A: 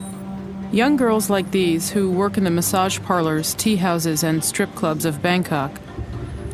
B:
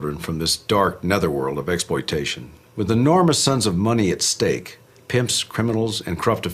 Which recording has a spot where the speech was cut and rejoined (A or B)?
B